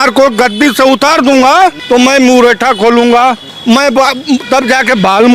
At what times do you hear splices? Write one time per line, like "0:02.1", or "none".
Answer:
0:01.8
0:03.5

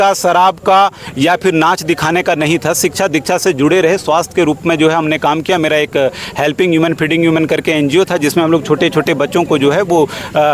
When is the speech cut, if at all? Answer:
none

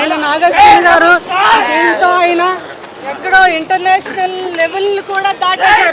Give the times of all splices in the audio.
0:04.0

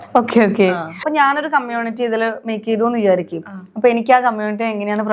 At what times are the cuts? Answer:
none

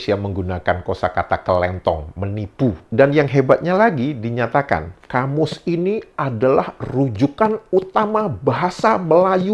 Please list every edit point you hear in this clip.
0:02.8
0:05.0

